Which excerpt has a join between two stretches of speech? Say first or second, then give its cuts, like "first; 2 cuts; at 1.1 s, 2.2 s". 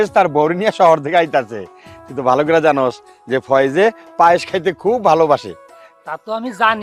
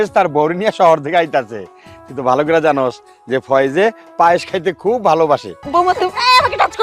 second; 1 cut; at 5.6 s